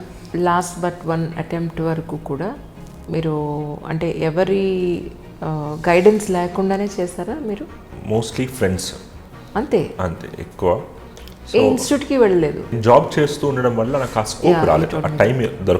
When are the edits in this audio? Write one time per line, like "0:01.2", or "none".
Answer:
0:07.8
0:12.8